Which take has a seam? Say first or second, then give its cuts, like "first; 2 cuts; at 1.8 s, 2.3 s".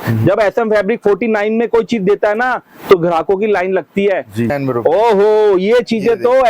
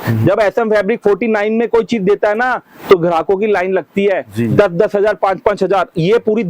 first; 1 cut; at 4.5 s